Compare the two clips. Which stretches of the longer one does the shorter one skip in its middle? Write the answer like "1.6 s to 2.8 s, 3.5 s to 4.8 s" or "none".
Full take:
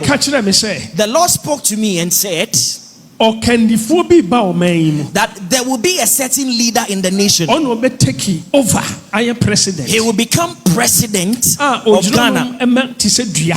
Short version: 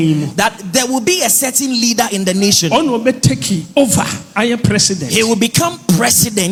none

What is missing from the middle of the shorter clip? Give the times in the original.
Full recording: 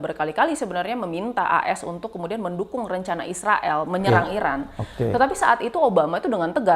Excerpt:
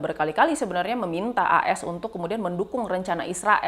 none

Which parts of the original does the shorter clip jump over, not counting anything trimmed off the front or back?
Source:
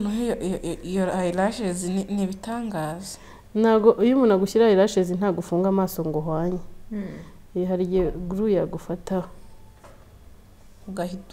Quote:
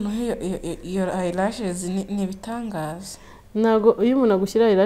none

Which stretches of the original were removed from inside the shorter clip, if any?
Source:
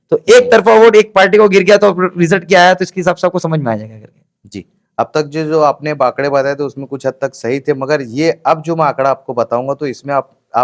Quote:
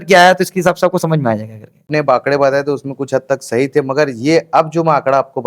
4.3 s to 5.8 s

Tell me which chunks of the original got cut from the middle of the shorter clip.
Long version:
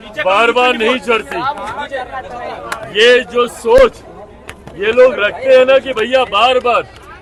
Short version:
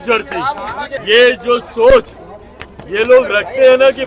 1.9 s to 2.8 s

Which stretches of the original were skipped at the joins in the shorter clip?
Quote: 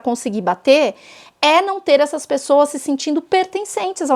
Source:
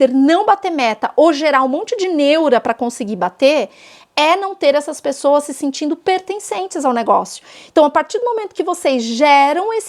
none

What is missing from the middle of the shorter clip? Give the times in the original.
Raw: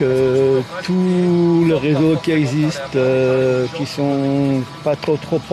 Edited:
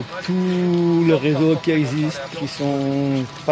2.9 s to 3.7 s

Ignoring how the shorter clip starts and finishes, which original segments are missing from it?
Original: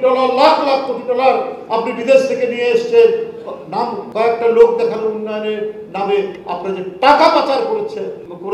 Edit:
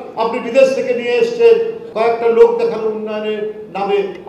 3.4 s to 4.0 s

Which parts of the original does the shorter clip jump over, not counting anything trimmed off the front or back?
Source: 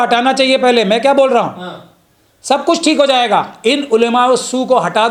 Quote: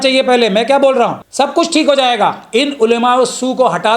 1.6 s to 2.3 s

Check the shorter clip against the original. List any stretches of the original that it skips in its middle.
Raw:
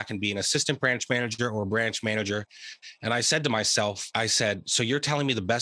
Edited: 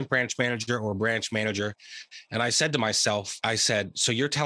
none

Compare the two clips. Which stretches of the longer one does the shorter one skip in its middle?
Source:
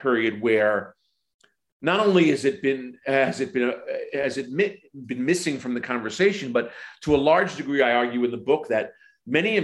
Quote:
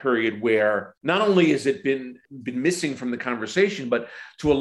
0.9 s to 1.7 s, 3.0 s to 4.8 s

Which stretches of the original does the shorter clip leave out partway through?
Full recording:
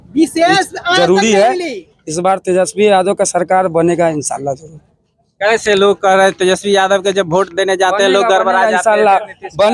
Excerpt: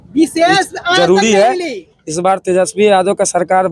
none

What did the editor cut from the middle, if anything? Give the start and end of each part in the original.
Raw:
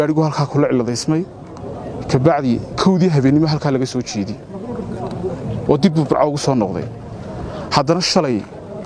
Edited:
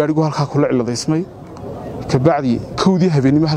none

